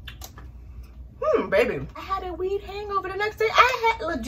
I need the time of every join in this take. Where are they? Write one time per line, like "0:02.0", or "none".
0:02.0